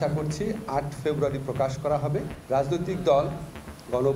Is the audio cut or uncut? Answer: cut